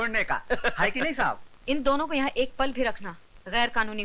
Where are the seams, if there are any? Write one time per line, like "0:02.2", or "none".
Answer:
0:01.5